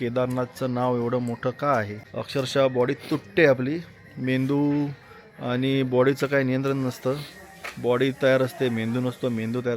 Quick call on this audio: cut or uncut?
uncut